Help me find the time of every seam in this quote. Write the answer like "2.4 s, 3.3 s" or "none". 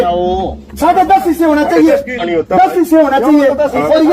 2.2 s